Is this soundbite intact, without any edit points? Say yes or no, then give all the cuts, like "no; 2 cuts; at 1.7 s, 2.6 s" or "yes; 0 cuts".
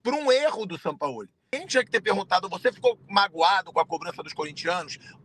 no; 1 cut; at 1.6 s